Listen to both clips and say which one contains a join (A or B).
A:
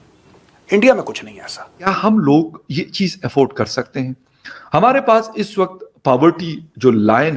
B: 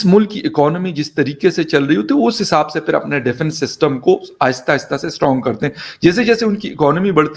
A